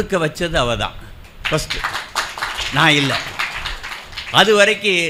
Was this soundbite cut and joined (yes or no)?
no